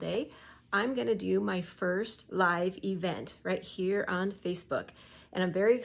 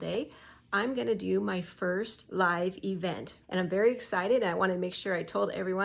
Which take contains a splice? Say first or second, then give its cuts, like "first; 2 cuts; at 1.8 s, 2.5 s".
second; 1 cut; at 3.3 s